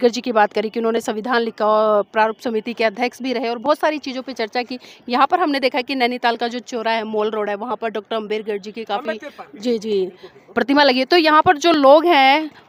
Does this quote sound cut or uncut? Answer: uncut